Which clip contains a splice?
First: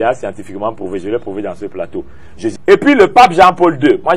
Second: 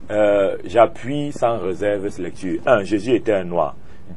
first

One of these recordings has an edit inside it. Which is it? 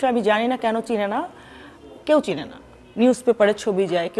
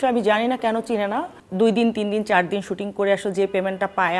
second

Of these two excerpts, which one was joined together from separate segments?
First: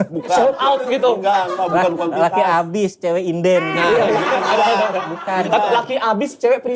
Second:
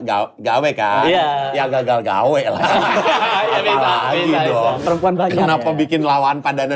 second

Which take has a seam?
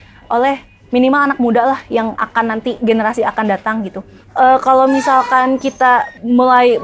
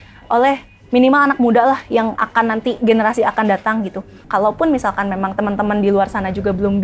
second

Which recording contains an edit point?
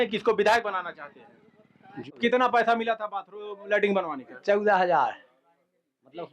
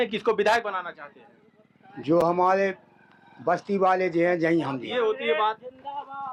first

